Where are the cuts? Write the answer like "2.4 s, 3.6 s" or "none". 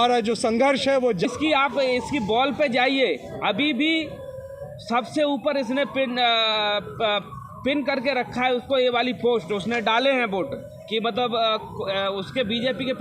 1.2 s